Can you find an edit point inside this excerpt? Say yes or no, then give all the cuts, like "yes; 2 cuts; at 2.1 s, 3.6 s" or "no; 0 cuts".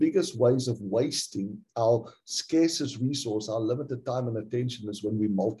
no; 0 cuts